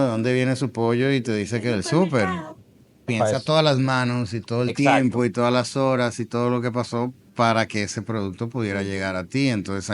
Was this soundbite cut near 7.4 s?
no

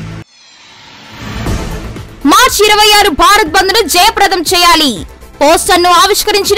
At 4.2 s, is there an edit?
no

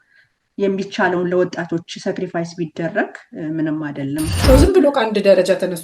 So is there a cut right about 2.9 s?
no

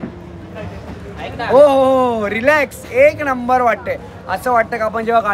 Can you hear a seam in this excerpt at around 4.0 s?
no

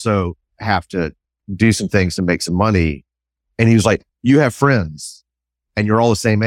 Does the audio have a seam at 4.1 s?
yes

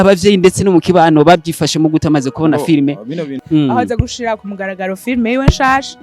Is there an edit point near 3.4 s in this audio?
yes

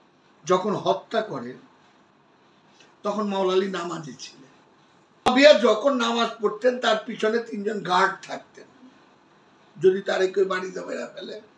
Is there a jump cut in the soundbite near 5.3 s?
yes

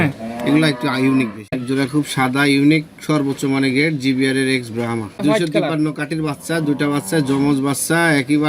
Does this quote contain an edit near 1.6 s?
yes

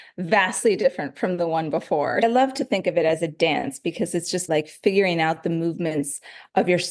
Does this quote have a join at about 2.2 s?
yes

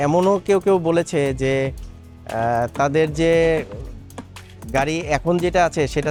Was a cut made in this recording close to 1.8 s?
no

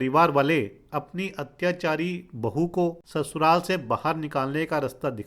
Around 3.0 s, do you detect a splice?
yes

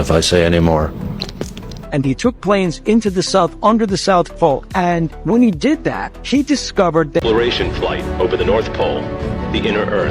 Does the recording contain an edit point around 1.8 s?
yes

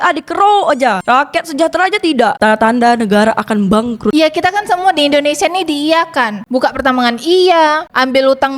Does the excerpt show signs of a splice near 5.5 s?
no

